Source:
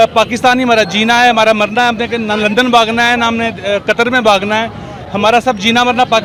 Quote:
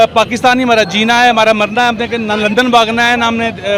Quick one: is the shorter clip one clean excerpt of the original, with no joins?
yes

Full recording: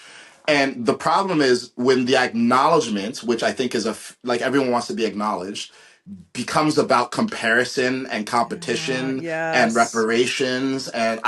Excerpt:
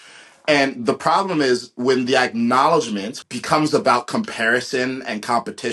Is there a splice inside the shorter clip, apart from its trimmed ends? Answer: yes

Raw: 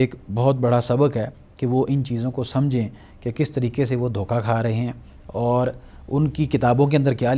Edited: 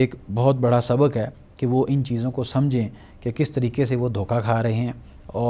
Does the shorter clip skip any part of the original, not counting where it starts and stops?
no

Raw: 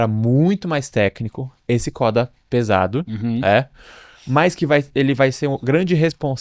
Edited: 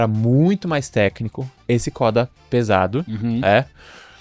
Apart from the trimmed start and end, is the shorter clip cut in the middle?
no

